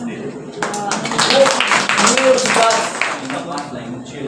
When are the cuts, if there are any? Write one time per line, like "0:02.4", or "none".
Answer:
0:03.2